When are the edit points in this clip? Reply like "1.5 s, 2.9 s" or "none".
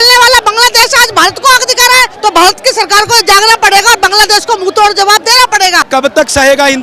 2.1 s, 5.8 s